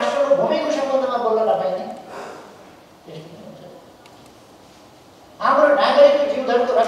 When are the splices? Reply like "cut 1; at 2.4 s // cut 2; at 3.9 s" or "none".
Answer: none